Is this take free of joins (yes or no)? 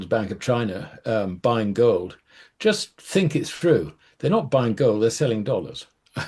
yes